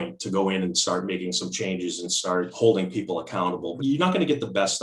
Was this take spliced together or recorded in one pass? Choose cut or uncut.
cut